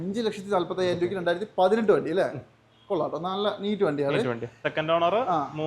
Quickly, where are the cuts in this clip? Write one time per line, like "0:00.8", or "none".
0:04.5